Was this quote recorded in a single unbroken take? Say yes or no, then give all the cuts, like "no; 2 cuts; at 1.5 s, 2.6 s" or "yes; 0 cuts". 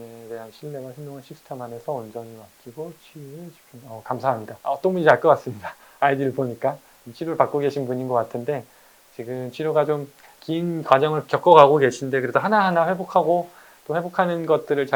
yes; 0 cuts